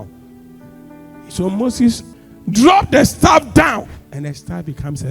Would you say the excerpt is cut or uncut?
cut